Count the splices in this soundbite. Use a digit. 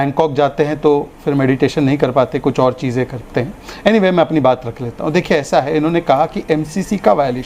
0